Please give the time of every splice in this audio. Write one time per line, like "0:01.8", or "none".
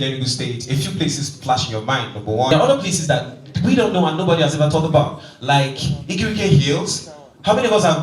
0:02.5